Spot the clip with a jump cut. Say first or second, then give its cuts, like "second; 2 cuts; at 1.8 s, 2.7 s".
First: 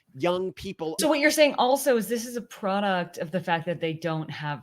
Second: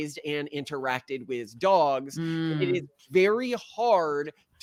first; 1 cut; at 1.0 s